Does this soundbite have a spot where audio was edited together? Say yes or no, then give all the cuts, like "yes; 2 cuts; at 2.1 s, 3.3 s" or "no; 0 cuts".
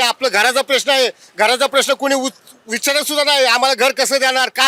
no; 0 cuts